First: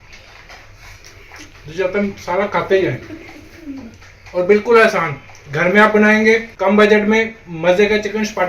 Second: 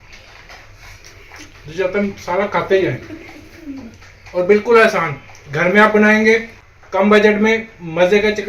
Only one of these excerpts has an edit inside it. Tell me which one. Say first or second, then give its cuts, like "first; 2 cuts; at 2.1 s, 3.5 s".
first; 1 cut; at 6.5 s